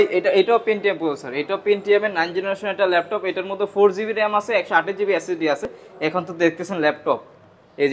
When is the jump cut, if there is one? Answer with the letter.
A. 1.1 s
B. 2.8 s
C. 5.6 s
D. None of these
D